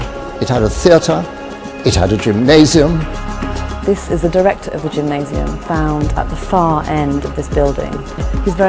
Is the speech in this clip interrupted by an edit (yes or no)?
yes